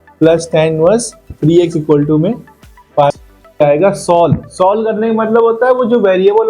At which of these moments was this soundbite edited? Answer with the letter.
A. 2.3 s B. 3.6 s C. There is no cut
B